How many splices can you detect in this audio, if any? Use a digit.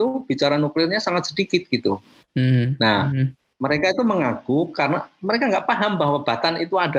0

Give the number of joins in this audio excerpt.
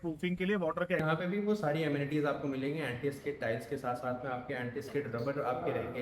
1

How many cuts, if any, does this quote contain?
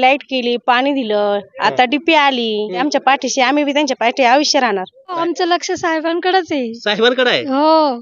2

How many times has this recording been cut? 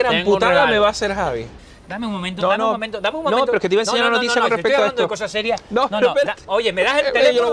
1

